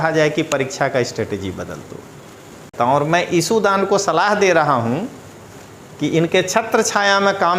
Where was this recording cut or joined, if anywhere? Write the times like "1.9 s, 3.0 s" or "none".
2.7 s

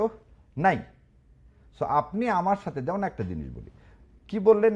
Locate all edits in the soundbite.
none

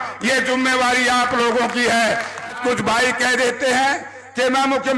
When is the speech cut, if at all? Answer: 2.5 s

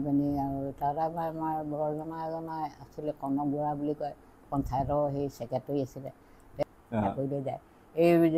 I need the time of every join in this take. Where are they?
6.6 s

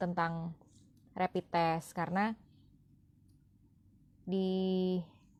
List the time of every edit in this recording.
none

